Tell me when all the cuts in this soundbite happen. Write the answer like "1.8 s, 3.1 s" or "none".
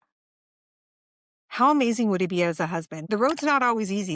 2.9 s